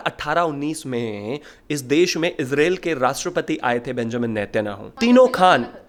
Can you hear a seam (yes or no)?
no